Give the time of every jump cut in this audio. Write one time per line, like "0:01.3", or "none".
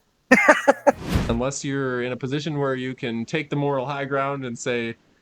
0:01.0